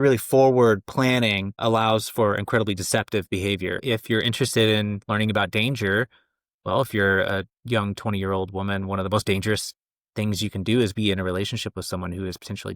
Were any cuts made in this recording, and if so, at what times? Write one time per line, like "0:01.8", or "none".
0:03.8

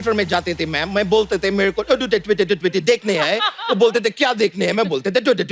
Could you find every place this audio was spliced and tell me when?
none

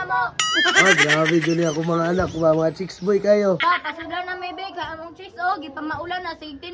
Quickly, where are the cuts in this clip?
0:03.6

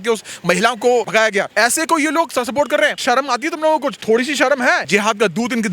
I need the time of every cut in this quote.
0:01.2
0:03.0
0:04.0
0:04.8

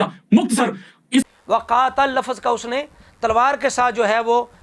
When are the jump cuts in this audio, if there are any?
0:01.3

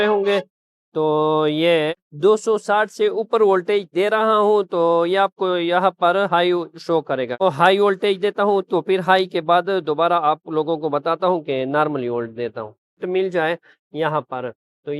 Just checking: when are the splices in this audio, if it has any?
0:02.0
0:07.4
0:13.0

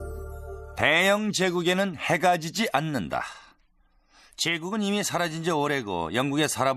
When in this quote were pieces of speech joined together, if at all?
0:03.4

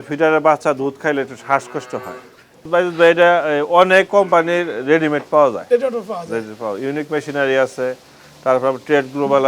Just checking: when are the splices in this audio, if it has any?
0:02.6

